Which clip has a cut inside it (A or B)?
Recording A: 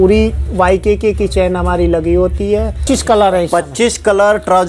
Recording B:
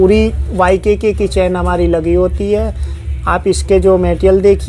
A